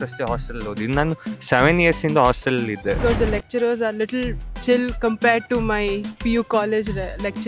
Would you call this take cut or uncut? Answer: cut